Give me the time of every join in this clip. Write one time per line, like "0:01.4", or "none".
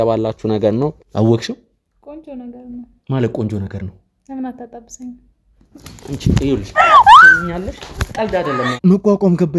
0:01.0
0:08.7